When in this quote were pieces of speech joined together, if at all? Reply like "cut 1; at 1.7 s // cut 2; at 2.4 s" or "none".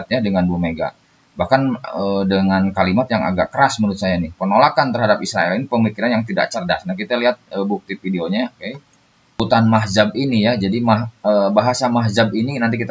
cut 1; at 9.4 s